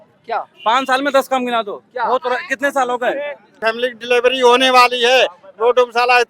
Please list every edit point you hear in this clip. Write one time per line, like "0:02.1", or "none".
0:03.6